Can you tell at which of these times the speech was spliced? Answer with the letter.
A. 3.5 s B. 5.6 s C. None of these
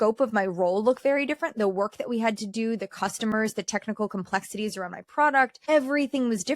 B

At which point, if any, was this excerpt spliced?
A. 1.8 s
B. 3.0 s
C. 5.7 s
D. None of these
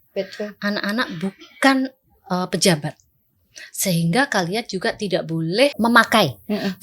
C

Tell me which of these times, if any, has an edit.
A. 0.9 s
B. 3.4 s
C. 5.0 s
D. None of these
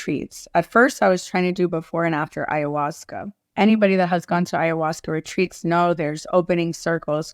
B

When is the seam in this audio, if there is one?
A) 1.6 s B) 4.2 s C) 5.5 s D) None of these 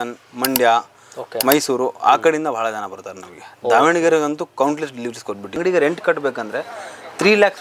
C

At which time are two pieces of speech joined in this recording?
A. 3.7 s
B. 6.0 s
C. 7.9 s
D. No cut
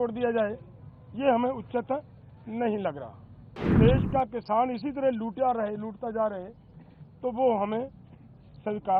A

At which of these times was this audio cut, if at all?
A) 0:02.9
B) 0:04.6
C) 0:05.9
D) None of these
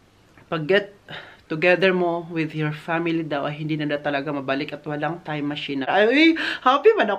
C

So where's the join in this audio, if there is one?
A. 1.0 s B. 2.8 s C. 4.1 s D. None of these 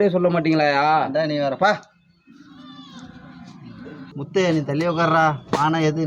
C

